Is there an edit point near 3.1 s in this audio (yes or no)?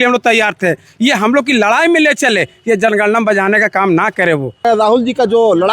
no